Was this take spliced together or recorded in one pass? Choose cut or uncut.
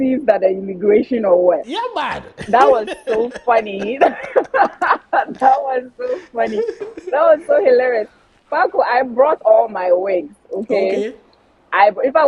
uncut